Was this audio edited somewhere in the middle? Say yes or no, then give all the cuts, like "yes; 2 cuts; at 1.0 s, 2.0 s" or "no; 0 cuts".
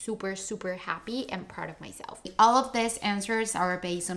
yes; 1 cut; at 2.3 s